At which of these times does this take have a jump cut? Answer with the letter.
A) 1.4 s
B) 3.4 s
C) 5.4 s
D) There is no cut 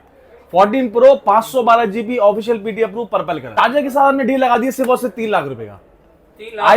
B